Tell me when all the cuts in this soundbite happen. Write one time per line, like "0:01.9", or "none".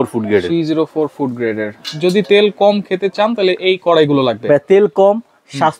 0:01.7